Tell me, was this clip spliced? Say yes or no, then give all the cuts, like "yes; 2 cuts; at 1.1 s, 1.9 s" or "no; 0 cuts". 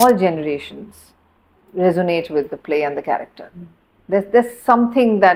no; 0 cuts